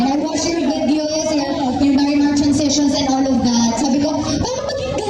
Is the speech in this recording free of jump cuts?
yes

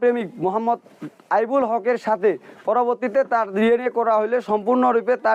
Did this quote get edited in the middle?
no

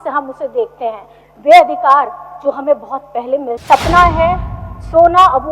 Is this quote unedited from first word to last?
no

